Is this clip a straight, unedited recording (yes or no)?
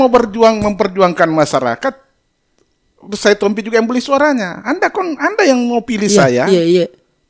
yes